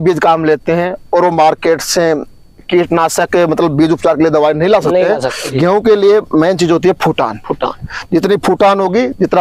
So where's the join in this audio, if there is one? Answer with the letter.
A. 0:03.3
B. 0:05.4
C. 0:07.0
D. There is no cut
B